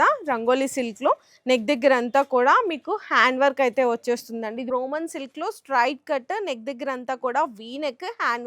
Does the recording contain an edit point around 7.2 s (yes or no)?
no